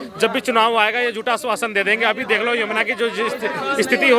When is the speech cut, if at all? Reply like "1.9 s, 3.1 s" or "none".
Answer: none